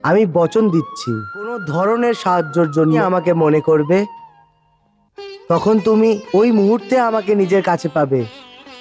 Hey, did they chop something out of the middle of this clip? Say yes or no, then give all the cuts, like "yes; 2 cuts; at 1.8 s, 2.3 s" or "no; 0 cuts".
yes; 2 cuts; at 1.6 s, 3.0 s